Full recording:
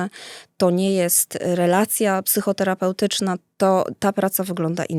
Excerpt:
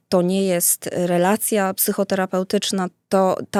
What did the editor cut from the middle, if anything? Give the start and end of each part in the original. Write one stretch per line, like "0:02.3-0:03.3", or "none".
none